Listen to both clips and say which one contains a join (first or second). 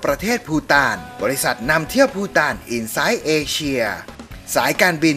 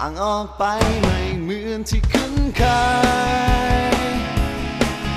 first